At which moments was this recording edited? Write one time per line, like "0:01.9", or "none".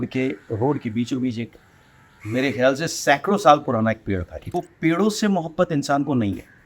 0:04.5